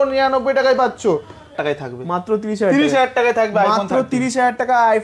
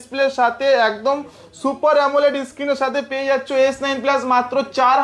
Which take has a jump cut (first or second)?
first